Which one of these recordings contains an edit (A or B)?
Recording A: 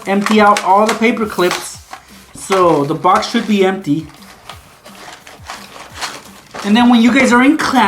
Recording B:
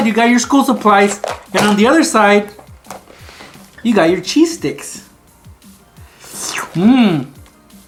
A